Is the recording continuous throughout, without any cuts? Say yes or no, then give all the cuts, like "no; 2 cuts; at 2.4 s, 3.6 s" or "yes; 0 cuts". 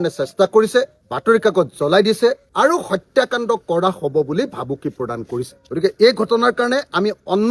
no; 2 cuts; at 2.4 s, 5.6 s